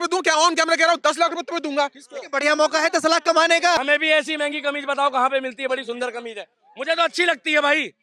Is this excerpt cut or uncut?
cut